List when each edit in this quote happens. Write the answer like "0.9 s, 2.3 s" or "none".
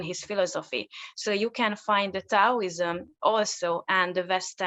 none